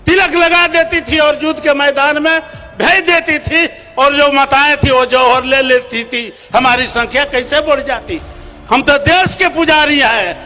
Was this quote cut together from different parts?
no; 0 cuts

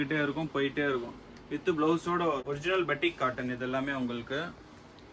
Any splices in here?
yes; 1 cut; at 2.4 s

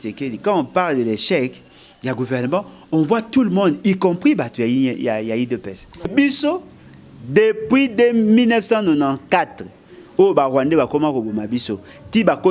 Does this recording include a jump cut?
yes; 1 cut; at 6.1 s

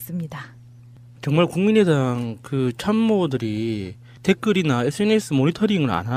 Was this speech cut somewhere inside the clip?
no; 0 cuts

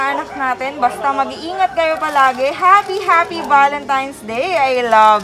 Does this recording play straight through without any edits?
yes; 0 cuts

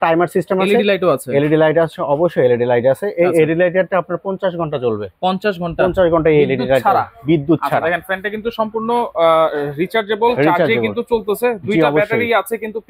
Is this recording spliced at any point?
no; 0 cuts

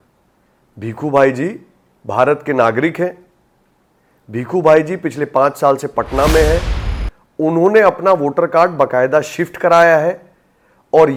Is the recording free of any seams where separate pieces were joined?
yes; 0 cuts

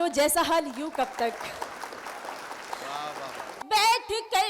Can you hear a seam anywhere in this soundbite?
yes; 1 cut; at 3.5 s

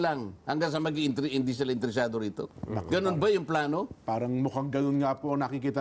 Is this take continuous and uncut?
yes; 0 cuts

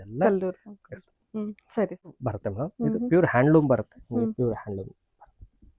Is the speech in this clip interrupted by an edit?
yes; 1 cut; at 2.2 s

